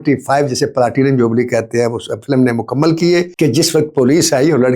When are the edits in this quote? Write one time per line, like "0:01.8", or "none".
0:03.3